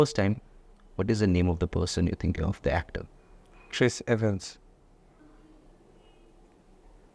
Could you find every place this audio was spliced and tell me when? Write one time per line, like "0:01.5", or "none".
0:05.2